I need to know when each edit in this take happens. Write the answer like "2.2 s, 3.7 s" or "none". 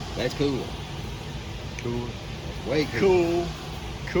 none

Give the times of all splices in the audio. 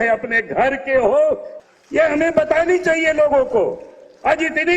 1.5 s

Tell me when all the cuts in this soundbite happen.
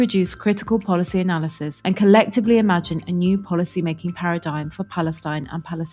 none

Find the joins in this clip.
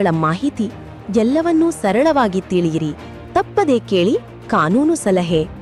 none

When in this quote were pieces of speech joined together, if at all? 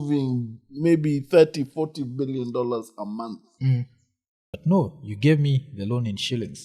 4.5 s

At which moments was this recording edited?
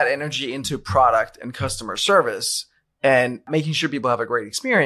3.5 s

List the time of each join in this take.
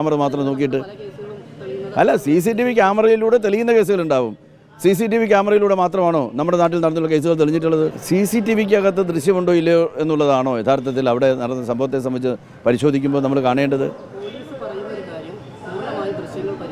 8.0 s

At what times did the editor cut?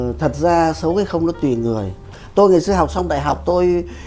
2.0 s

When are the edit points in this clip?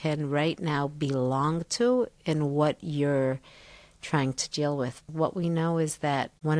5.1 s

